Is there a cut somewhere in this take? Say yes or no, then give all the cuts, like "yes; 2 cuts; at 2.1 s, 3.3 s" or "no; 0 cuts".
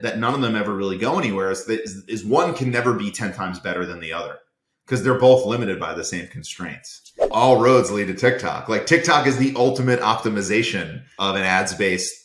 yes; 2 cuts; at 7.3 s, 11.1 s